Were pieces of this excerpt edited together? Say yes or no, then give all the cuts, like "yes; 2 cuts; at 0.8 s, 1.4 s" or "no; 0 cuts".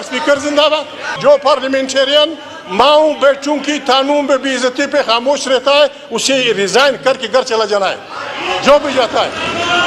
yes; 1 cut; at 1.1 s